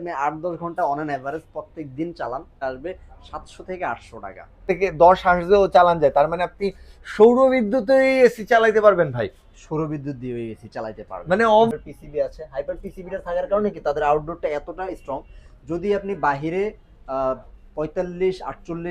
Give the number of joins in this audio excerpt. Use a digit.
3